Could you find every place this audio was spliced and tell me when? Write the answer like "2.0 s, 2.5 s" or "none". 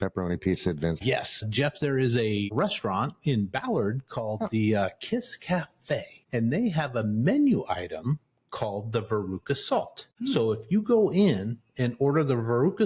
1.5 s, 2.5 s, 6.2 s, 10.0 s